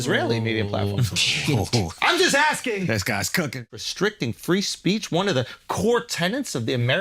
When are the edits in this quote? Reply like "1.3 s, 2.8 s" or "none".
3.7 s

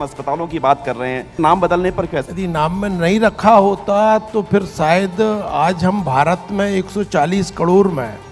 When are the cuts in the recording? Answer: 1.3 s, 2.3 s

